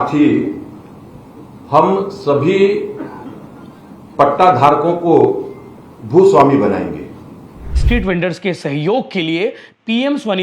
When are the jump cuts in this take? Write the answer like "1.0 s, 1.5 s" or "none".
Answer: 7.8 s

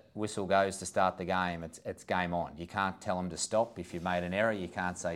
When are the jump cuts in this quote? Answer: none

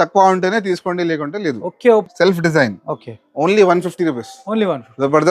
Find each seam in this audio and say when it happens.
2.1 s

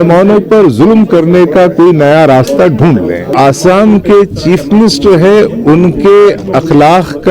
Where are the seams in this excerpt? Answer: 3.3 s

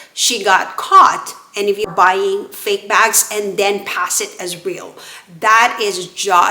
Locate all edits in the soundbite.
1.9 s

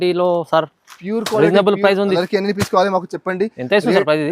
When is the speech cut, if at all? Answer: 2.2 s

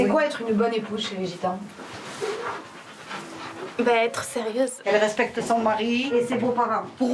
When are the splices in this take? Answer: none

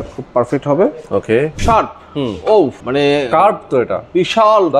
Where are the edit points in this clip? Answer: 1.6 s, 2.8 s

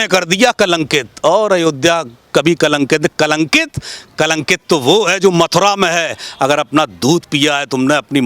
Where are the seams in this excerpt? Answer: none

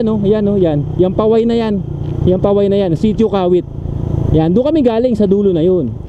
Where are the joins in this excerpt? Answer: none

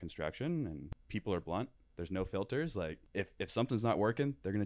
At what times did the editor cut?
0.9 s, 3.0 s

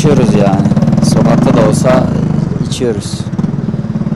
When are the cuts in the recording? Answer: none

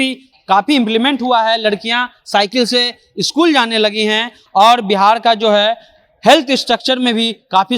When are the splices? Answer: none

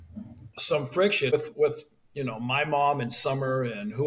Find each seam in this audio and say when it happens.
1.3 s

